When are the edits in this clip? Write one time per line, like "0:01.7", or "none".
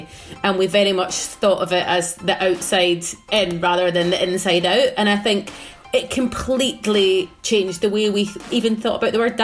0:07.4
0:08.5